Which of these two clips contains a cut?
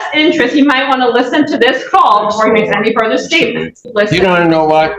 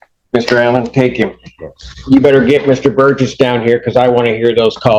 first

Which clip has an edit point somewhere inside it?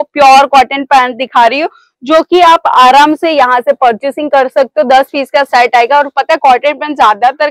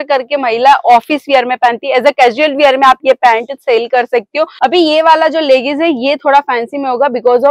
second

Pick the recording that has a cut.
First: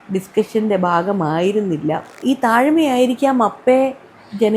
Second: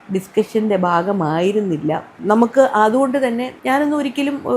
first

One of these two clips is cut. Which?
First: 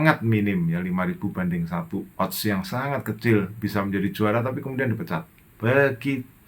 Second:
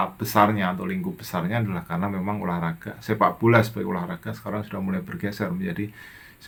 first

